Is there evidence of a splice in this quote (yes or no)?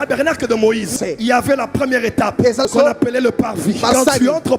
yes